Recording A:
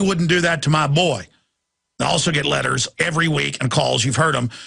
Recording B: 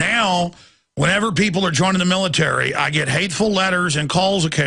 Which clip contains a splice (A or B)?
A